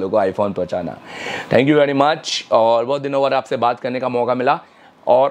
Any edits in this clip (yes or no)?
no